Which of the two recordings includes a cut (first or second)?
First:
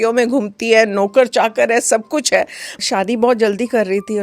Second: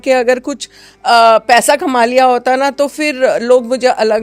first